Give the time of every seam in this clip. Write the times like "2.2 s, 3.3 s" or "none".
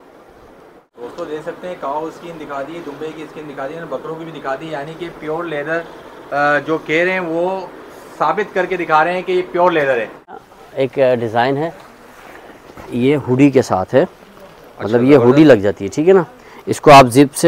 1.0 s, 10.4 s

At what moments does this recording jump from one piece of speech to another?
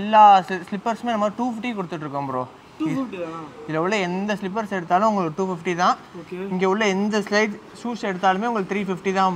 none

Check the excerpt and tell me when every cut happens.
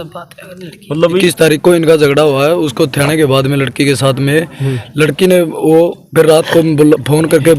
1.2 s

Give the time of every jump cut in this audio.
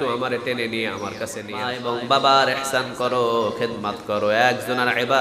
1.8 s

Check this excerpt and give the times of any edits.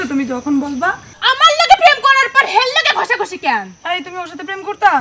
1.2 s

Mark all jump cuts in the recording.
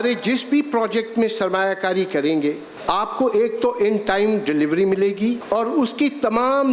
2.7 s, 5.4 s

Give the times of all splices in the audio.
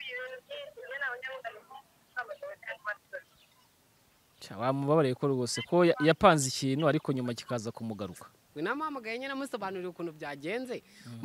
8.5 s

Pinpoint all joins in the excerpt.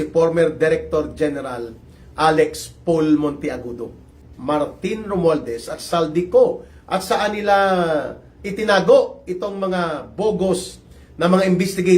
4.1 s

